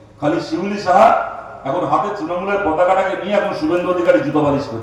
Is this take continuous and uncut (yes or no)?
yes